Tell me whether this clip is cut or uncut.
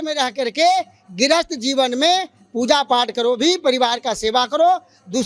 uncut